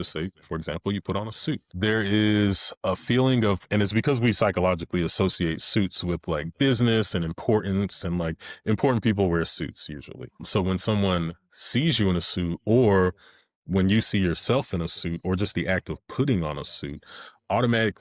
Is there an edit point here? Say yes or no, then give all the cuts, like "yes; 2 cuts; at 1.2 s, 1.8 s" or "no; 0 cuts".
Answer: yes; 2 cuts; at 1.7 s, 10.4 s